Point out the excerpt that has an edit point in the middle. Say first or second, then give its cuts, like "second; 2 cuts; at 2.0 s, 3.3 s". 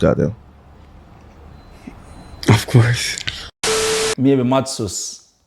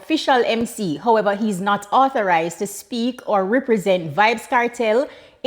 first; 1 cut; at 3.8 s